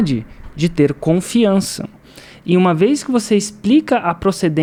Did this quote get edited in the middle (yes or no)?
no